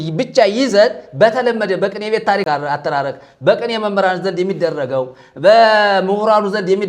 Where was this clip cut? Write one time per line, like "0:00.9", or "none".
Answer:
0:02.4